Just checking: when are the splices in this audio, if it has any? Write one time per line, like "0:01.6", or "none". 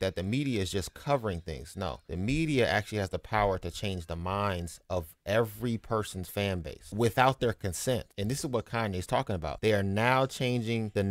0:02.0